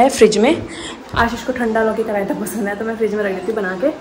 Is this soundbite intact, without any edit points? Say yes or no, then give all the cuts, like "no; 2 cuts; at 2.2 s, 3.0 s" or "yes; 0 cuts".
yes; 0 cuts